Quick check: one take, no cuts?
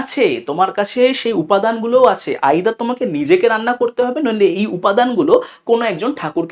yes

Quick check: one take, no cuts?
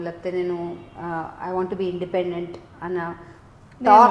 yes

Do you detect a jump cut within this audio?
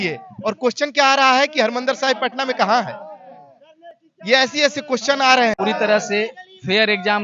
yes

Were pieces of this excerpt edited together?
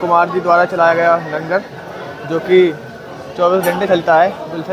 no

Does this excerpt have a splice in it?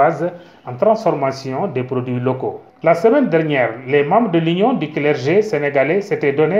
yes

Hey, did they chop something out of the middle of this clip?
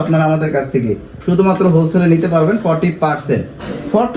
no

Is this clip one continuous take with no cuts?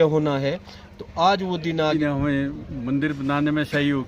no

